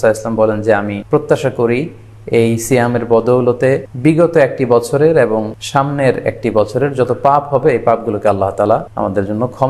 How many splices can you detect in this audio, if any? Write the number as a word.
four